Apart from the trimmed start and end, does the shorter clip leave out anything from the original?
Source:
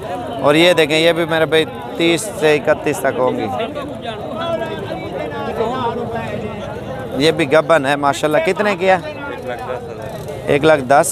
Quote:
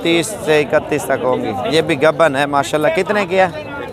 yes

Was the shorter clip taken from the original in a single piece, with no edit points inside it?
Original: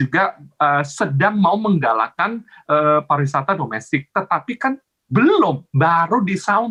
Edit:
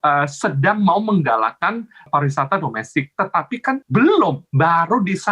no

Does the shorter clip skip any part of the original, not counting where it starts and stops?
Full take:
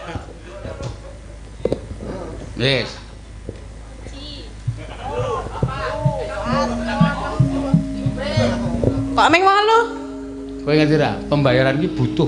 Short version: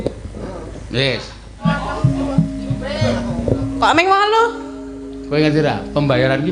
yes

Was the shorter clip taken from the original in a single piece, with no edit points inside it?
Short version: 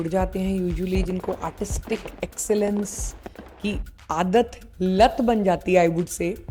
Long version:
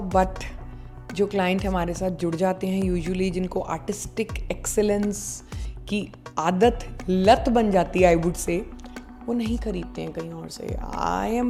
yes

